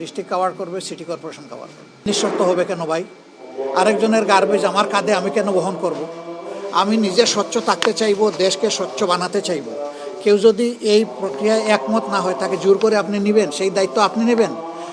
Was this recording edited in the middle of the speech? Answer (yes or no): yes